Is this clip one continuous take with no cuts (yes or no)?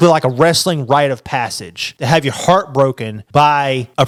yes